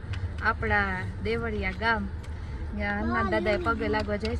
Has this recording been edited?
no; 0 cuts

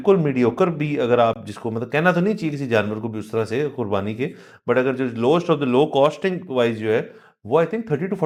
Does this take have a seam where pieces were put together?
no; 0 cuts

